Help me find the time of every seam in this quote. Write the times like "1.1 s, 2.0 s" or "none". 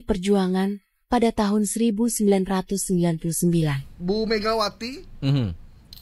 3.9 s